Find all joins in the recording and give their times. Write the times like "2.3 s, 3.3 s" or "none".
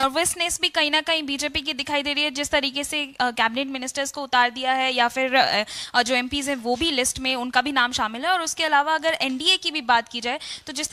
none